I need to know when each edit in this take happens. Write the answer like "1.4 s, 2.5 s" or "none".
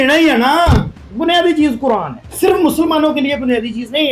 1.0 s